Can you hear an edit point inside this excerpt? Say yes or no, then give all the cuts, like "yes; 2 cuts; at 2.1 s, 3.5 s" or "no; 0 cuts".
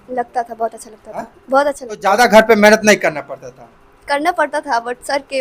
yes; 1 cut; at 2.0 s